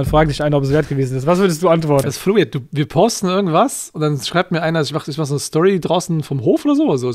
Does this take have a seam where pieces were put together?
yes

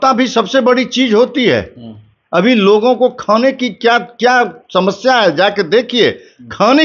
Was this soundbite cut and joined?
no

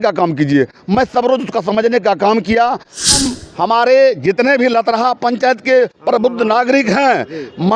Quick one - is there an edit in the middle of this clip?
yes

